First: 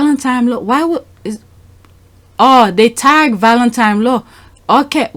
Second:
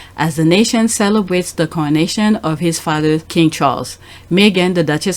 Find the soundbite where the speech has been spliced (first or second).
second